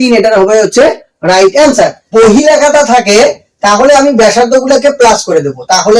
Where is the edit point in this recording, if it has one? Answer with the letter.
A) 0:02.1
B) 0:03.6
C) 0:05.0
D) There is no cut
A